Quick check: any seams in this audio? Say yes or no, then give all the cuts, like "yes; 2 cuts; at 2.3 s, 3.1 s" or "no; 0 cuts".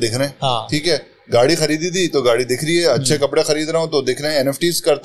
no; 0 cuts